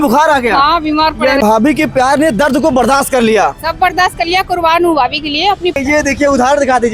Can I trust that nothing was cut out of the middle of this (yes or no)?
no